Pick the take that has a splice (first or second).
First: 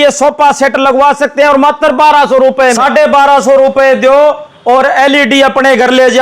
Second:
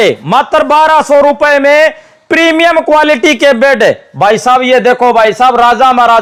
first